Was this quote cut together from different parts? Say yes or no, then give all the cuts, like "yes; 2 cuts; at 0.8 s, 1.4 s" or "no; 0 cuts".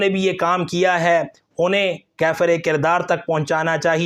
no; 0 cuts